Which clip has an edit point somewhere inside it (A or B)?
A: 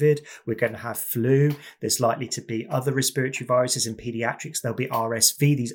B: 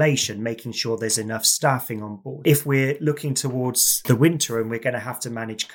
B